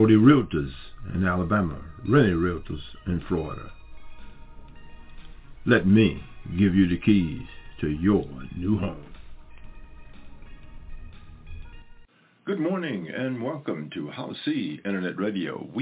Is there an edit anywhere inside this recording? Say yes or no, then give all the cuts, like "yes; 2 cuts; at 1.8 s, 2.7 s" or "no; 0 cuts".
yes; 1 cut; at 12.0 s